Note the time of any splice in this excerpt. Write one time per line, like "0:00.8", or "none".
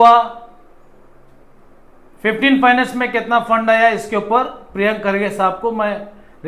none